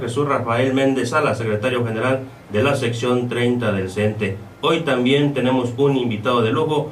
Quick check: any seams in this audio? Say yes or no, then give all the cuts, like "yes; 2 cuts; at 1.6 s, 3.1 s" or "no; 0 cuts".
no; 0 cuts